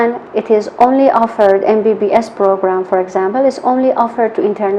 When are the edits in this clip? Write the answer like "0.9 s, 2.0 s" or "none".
none